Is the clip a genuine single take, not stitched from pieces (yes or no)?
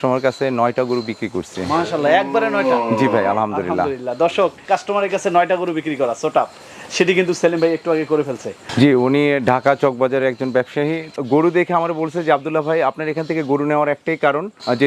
yes